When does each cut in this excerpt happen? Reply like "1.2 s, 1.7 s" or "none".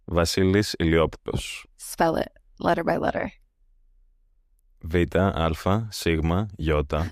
none